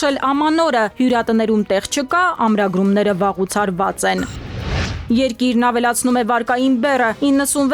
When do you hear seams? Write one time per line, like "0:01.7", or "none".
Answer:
0:04.9